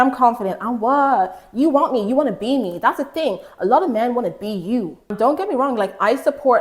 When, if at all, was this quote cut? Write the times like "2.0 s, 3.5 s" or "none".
5.1 s